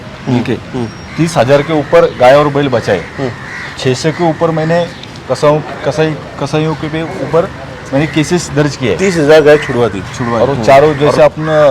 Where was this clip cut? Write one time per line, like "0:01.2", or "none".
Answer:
0:10.3